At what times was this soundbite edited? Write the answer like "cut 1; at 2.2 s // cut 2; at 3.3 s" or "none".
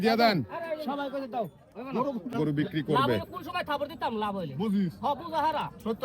cut 1; at 2.3 s